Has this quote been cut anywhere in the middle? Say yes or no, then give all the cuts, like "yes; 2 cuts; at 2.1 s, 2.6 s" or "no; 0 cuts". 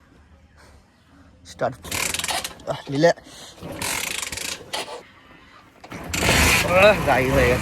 yes; 2 cuts; at 1.8 s, 5.0 s